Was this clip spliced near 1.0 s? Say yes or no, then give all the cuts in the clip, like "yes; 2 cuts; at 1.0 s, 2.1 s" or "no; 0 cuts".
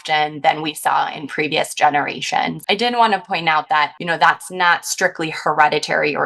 no; 2 cuts; at 2.6 s, 4.0 s